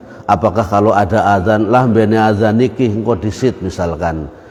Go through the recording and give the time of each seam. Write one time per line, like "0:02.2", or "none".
none